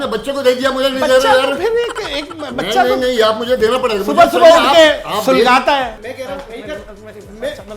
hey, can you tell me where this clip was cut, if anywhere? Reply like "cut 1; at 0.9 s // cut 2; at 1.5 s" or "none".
cut 1; at 5.9 s